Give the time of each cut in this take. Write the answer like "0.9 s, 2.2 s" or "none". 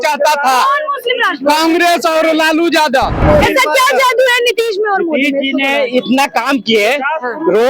3.2 s